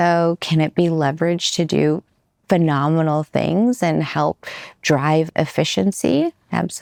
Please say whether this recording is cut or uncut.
uncut